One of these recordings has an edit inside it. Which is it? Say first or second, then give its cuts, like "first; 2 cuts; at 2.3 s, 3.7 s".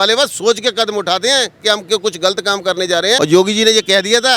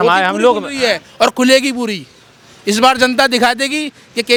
first; 1 cut; at 3.2 s